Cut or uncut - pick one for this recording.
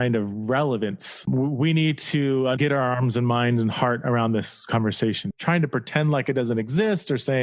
cut